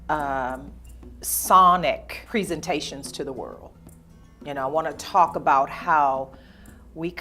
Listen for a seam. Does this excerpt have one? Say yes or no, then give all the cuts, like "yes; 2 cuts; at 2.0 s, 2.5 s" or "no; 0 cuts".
yes; 1 cut; at 2.1 s